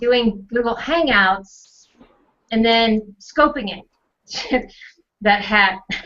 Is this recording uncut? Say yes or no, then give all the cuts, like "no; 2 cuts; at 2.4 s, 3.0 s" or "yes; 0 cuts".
no; 1 cut; at 1.2 s